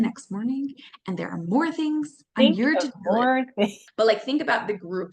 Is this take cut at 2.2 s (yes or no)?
no